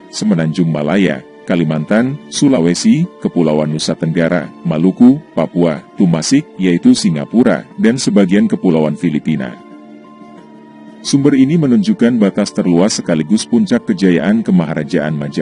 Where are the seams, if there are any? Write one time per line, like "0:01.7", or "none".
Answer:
none

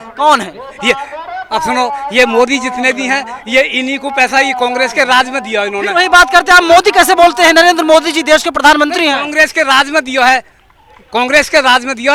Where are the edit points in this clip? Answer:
none

